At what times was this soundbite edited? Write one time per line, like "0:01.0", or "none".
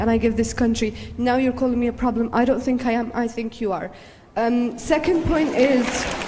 none